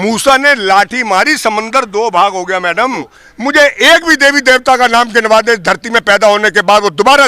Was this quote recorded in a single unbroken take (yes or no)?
no